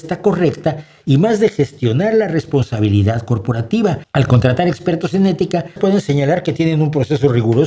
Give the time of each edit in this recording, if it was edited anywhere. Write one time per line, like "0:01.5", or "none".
0:04.0
0:05.7

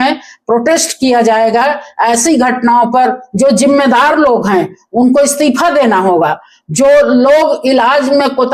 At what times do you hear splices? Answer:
none

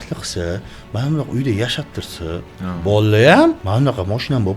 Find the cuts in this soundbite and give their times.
0:02.5
0:03.6

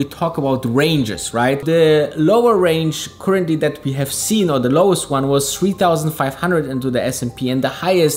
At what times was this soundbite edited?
0:01.6

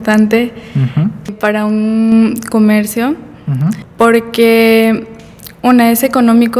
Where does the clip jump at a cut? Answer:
0:01.3
0:03.8

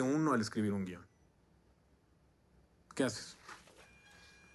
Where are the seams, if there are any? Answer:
none

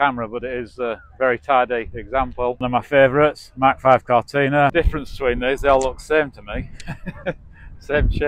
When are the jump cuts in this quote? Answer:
0:02.6
0:04.7

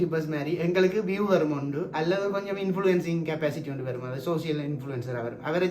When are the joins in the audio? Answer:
none

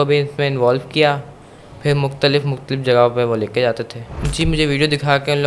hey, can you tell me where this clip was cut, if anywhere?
0:04.2

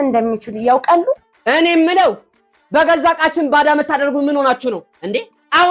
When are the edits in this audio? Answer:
0:01.3

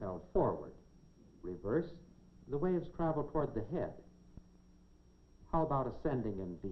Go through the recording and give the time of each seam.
0:02.5

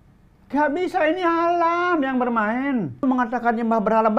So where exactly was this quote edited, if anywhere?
0:03.0

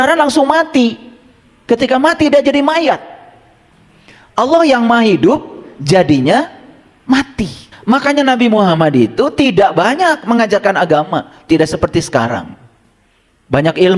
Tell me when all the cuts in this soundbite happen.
0:07.7

